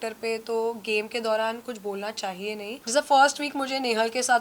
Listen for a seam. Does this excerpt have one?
yes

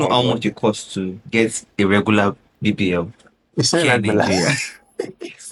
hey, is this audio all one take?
yes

